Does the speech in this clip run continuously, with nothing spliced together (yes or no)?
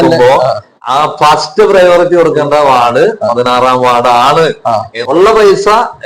no